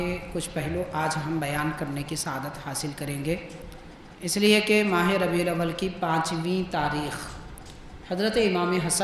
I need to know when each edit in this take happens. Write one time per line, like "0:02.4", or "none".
none